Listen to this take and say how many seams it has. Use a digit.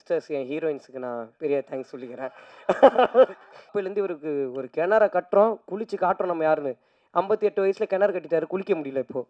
1